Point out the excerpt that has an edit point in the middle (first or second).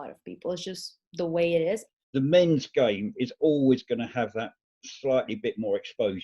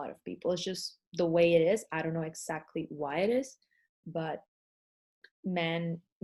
first